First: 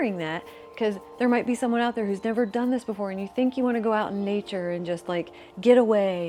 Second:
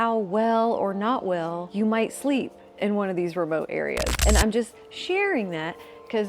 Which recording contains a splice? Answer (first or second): second